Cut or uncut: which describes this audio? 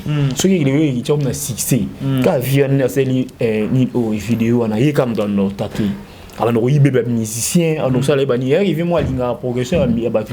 uncut